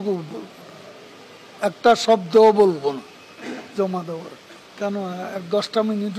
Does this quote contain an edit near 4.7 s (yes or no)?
yes